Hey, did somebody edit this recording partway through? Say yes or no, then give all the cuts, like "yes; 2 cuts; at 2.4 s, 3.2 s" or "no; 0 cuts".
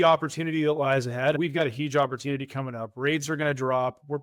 no; 0 cuts